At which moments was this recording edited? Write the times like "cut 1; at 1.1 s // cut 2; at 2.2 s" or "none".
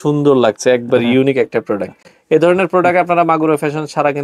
none